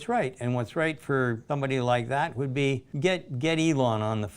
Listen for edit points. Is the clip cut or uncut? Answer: cut